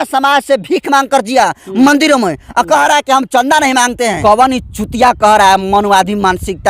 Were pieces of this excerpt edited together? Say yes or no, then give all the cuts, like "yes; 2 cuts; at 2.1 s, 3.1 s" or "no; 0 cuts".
yes; 1 cut; at 4.2 s